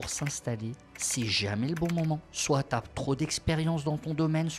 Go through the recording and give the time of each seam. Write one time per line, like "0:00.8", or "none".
0:02.3